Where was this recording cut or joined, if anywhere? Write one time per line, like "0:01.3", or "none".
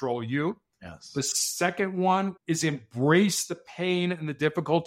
0:02.3